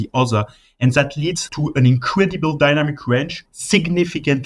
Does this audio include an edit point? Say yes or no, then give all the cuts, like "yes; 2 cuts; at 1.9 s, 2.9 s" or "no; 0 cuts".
yes; 2 cuts; at 1.5 s, 3.4 s